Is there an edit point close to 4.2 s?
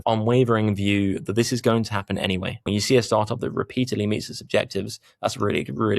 no; 1 cut; at 2.5 s

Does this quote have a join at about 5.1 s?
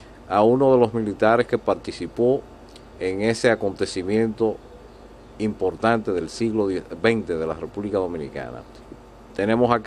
no; 1 cut; at 6.8 s

